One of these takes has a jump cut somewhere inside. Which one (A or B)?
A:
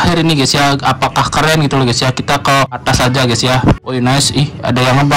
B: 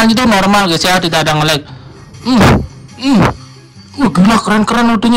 A